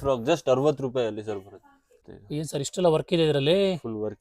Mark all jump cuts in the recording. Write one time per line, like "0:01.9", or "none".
0:01.9